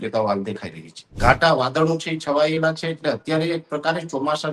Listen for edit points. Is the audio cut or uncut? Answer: cut